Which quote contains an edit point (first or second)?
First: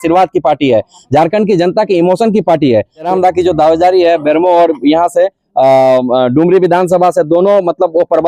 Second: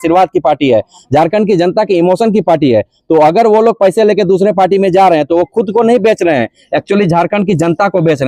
first